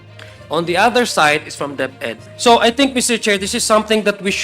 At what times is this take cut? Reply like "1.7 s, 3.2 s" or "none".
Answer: 2.1 s